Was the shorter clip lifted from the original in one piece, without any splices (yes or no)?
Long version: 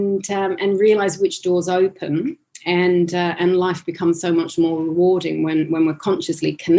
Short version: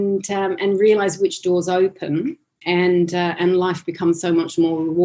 yes